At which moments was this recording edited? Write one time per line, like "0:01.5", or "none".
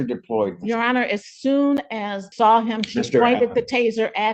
0:02.2